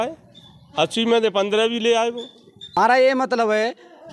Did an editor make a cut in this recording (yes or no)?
yes